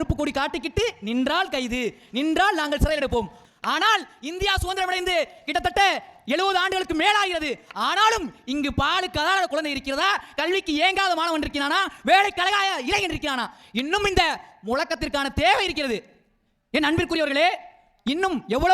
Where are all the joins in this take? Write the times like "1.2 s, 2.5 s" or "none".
3.4 s